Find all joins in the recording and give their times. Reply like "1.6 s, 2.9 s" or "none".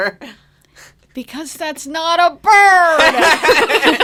none